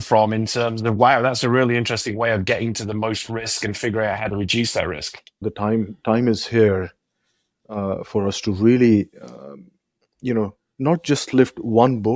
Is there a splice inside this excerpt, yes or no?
yes